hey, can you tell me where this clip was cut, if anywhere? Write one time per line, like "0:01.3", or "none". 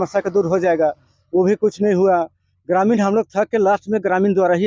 none